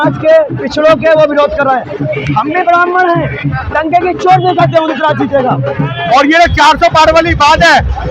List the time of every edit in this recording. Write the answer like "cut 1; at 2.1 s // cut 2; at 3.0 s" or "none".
cut 1; at 5.9 s